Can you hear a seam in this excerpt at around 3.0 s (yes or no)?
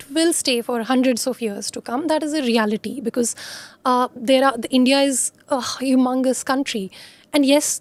no